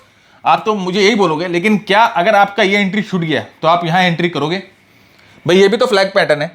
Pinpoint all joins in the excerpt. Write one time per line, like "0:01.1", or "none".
none